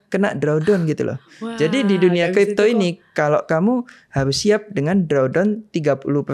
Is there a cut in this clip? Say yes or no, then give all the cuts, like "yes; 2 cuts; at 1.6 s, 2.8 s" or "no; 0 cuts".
no; 0 cuts